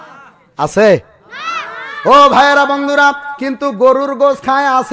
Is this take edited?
no; 0 cuts

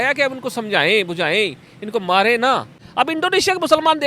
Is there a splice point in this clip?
yes; 1 cut; at 2.8 s

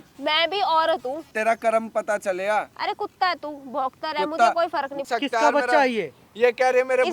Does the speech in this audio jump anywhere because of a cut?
yes; 2 cuts; at 1.2 s, 5.0 s

